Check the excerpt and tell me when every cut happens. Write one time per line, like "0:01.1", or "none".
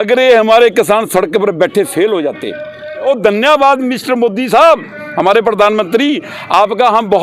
0:03.0

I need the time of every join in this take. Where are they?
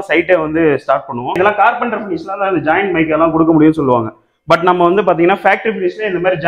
0:01.4

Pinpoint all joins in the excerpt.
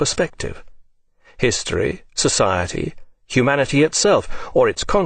0:01.7

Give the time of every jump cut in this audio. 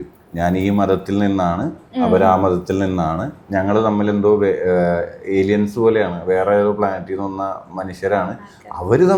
none

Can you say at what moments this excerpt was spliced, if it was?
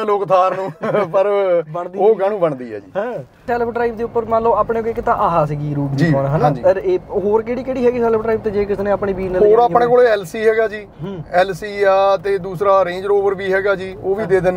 0:03.5

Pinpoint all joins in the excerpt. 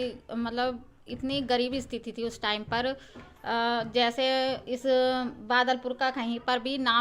none

